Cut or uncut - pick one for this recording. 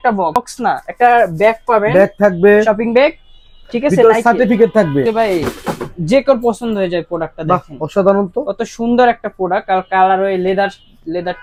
uncut